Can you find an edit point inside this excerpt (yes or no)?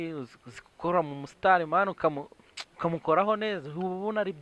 no